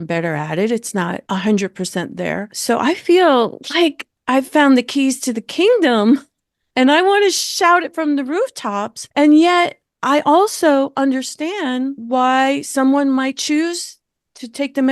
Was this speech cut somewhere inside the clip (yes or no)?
yes